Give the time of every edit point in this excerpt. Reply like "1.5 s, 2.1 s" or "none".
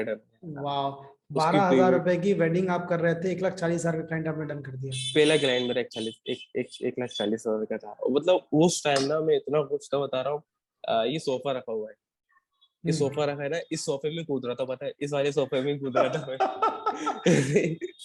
none